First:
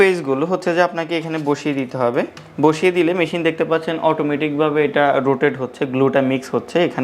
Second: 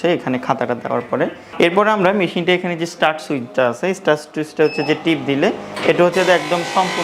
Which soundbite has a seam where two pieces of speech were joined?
second; 1 cut; at 1.4 s

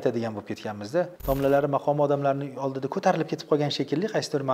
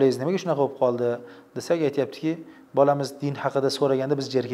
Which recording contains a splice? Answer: first; 1 cut; at 1.2 s

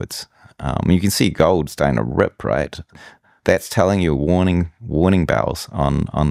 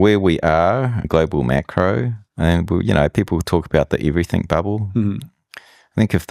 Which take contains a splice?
second; 2 cuts; at 1.1 s, 2.2 s

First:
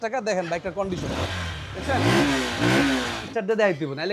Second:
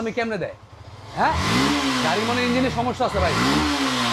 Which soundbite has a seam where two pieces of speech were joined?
first; 1 cut; at 3.2 s

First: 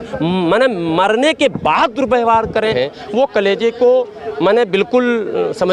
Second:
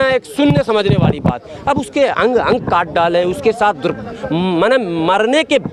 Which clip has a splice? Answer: first; 1 cut; at 2.7 s

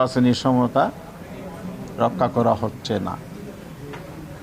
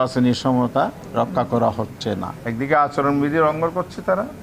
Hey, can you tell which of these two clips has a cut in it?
second; 2 cuts; at 1.0 s, 2.3 s

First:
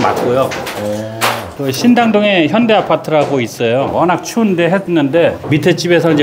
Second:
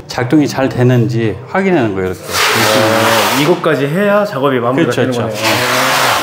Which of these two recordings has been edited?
first; 1 cut; at 1.5 s

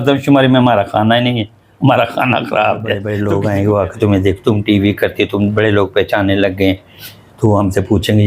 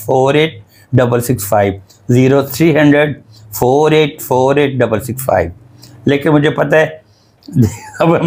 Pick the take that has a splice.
first; 1 cut; at 3.1 s

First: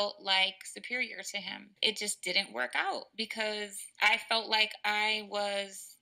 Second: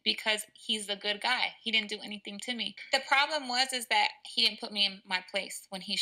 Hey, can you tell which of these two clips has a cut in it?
first; 1 cut; at 1.6 s

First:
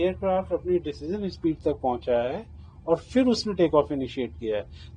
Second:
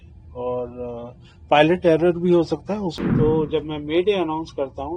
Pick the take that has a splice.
second; 1 cut; at 3.0 s

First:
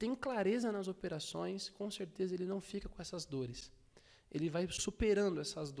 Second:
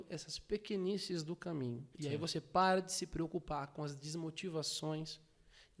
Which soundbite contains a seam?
first; 1 cut; at 4.8 s

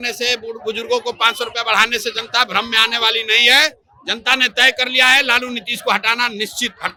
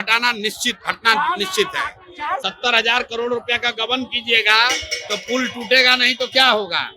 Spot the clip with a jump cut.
second; 1 cut; at 2.4 s

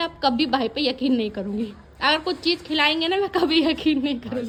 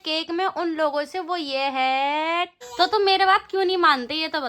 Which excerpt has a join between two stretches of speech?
second; 1 cut; at 2.6 s

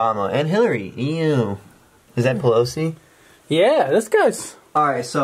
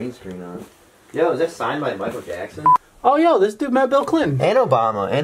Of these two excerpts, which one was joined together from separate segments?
second; 1 cut; at 2.7 s

